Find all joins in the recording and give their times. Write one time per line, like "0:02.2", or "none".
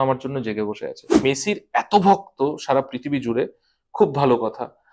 0:01.2